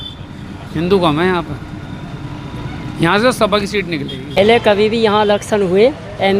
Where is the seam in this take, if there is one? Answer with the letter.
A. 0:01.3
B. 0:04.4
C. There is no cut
B